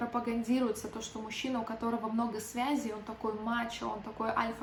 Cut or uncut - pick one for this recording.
uncut